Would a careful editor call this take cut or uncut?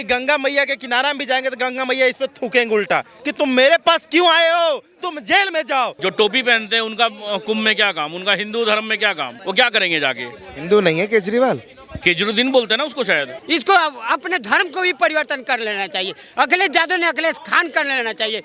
cut